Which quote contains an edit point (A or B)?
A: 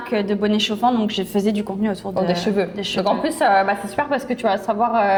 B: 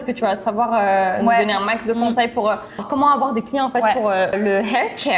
B